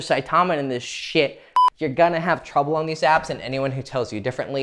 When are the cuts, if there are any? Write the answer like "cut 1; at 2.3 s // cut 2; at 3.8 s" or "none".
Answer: cut 1; at 1.5 s